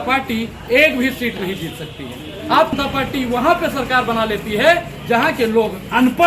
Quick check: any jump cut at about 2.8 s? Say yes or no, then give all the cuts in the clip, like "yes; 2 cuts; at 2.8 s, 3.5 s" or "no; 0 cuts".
yes; 1 cut; at 2.8 s